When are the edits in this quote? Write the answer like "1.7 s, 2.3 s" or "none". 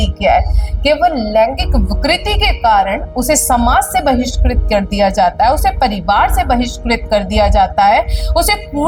none